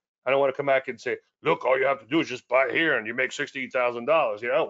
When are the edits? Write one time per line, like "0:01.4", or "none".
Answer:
none